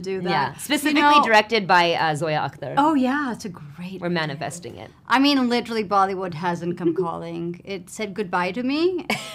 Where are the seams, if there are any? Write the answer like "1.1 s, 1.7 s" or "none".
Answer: none